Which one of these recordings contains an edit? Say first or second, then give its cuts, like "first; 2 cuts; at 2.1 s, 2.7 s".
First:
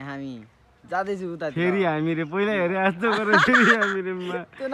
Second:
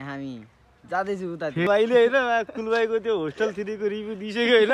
second; 1 cut; at 1.7 s